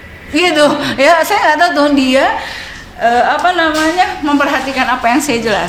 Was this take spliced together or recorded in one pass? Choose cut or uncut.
uncut